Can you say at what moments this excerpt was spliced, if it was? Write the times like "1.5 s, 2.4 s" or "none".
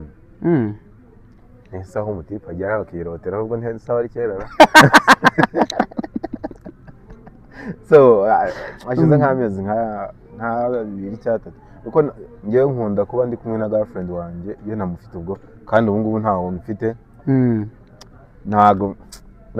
none